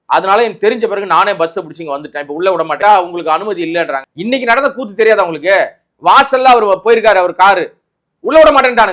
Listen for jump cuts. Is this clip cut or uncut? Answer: cut